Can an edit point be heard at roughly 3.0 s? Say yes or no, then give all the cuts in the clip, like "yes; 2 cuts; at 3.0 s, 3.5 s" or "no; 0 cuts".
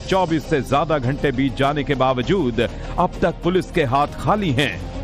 no; 0 cuts